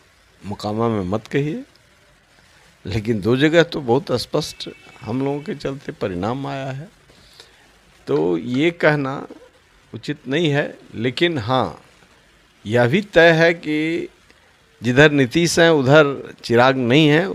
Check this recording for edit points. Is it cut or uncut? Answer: uncut